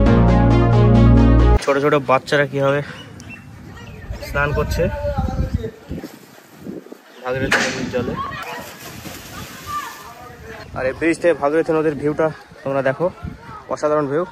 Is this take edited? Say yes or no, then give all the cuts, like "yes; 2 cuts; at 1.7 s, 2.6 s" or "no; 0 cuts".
yes; 3 cuts; at 1.6 s, 8.4 s, 10.7 s